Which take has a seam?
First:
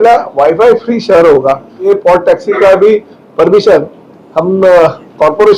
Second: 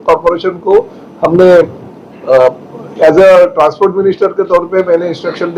first; 1 cut; at 1.8 s

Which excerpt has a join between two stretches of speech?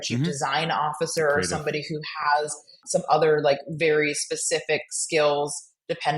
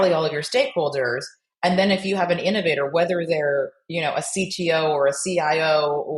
first; 1 cut; at 2.8 s

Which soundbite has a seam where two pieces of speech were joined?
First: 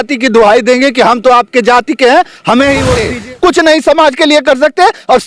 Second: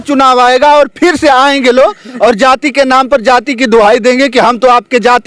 first; 1 cut; at 3.1 s

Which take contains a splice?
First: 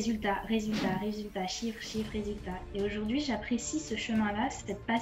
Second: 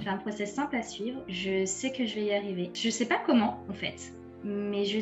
second; 2 cuts; at 1.3 s, 2.7 s

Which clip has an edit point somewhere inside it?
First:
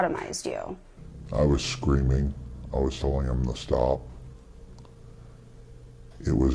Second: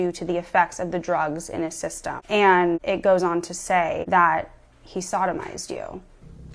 second; 3 cuts; at 2.2 s, 2.8 s, 4.0 s

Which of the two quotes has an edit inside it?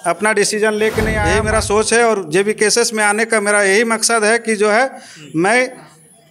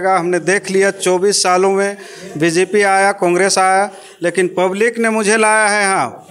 first; 1 cut; at 1.4 s

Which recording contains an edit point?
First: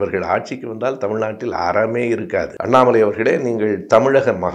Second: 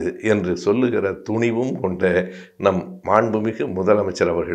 first; 1 cut; at 2.5 s

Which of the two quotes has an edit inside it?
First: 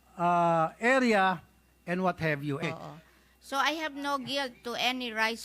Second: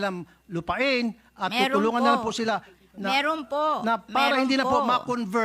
first; 1 cut; at 2.6 s

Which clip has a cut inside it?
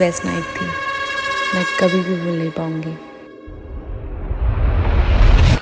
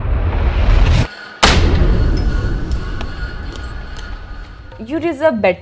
second; 1 cut; at 4.6 s

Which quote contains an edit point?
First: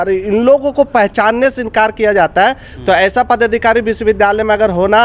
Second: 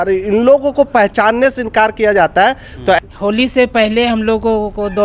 second; 1 cut; at 3.0 s

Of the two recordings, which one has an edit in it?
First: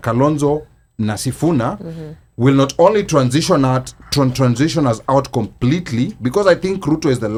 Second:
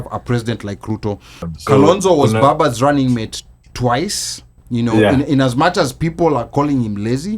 second; 1 cut; at 1.5 s

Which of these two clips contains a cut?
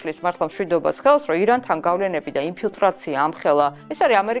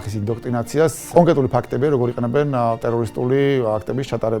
second; 1 cut; at 1.0 s

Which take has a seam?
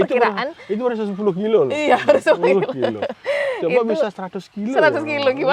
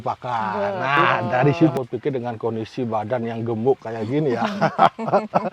second; 1 cut; at 1.7 s

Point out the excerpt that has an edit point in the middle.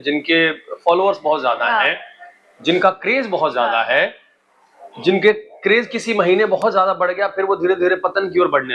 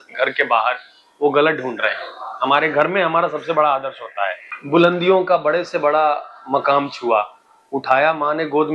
second; 1 cut; at 4.5 s

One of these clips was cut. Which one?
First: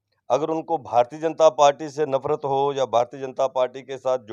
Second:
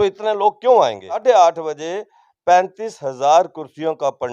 second; 1 cut; at 1.2 s

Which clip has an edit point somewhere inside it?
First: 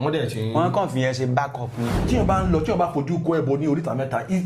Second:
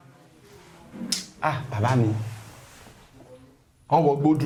first; 1 cut; at 2.0 s

